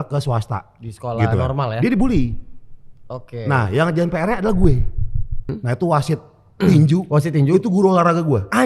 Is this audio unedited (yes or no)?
no